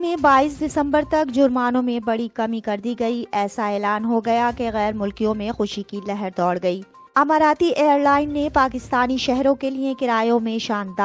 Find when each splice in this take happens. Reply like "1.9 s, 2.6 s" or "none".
6.9 s